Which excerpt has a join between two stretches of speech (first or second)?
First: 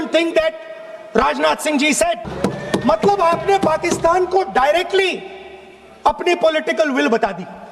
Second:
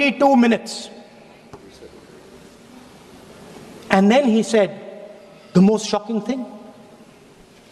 first